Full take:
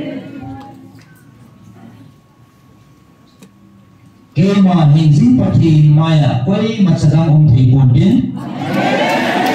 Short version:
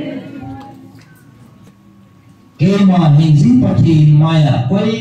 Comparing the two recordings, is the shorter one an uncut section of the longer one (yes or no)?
no